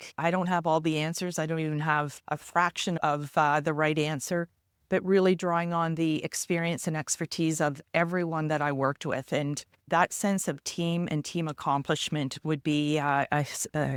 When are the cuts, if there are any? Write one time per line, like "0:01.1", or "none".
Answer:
none